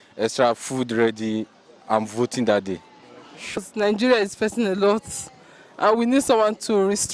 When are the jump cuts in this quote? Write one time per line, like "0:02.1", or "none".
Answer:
0:03.6